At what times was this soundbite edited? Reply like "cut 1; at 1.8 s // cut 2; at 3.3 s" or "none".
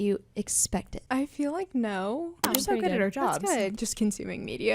cut 1; at 1.0 s // cut 2; at 2.4 s // cut 3; at 3.7 s